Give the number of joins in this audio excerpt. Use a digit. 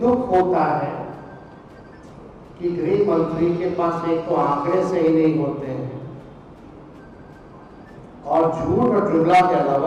0